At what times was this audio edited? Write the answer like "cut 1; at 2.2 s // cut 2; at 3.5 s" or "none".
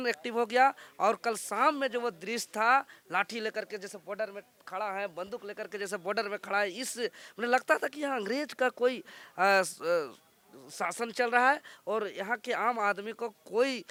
none